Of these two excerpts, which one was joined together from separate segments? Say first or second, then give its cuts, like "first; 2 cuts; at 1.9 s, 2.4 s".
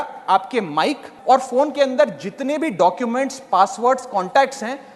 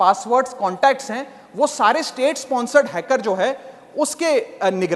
first; 1 cut; at 1.1 s